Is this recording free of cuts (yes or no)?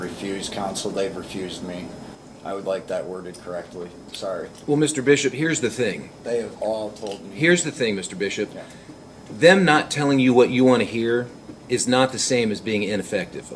yes